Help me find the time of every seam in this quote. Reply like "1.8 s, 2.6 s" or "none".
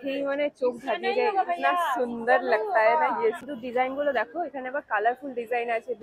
3.4 s